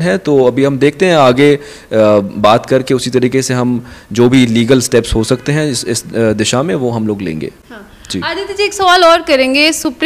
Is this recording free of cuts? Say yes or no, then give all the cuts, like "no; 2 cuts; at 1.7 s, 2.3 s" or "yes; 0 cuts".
yes; 0 cuts